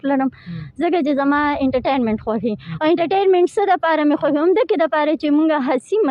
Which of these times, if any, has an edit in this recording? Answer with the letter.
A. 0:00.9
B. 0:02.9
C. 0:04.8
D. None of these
D